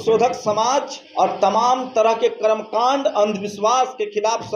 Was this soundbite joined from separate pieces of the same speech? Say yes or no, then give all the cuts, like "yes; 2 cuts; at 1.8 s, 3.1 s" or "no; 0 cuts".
yes; 1 cut; at 1.0 s